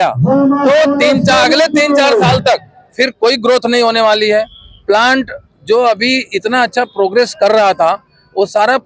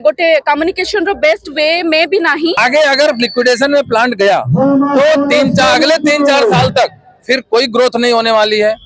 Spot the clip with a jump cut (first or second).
second